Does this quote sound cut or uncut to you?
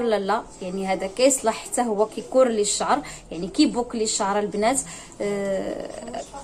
uncut